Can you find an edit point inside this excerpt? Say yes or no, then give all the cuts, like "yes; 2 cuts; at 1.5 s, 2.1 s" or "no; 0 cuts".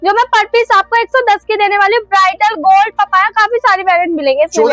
no; 0 cuts